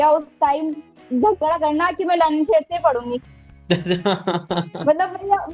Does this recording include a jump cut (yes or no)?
no